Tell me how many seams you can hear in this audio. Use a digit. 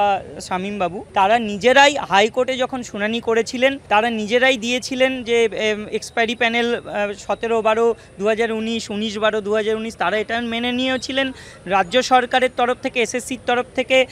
2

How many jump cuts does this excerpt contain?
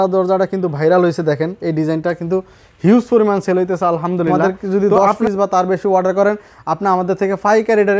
1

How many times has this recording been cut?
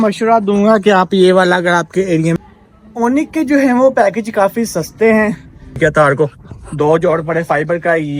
2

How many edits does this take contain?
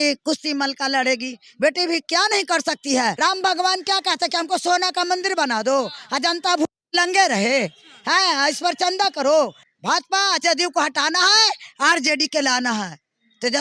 2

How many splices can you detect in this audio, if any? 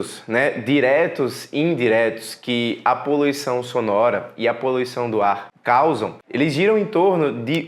2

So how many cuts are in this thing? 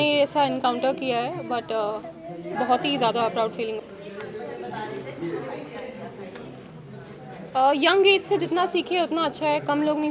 1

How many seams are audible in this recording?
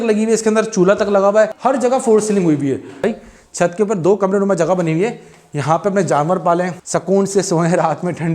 3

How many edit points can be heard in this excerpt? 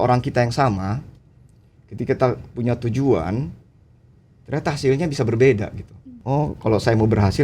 1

